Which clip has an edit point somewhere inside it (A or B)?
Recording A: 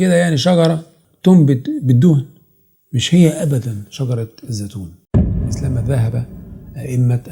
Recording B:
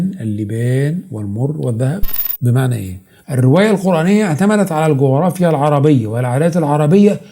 B